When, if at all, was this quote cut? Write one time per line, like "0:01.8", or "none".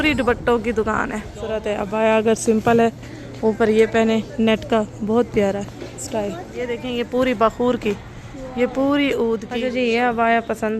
0:01.8
0:06.9
0:09.6